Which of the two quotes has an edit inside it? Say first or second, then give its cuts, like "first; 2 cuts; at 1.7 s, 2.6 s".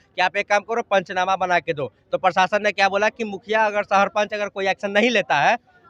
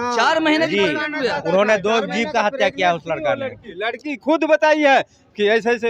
second; 1 cut; at 3.7 s